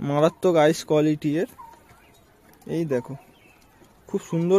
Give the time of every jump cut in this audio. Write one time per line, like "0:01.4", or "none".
none